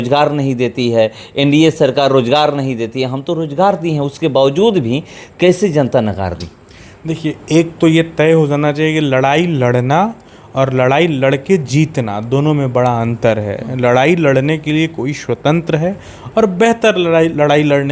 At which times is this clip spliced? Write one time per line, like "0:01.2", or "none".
none